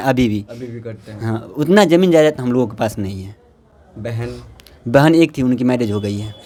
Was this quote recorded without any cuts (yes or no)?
yes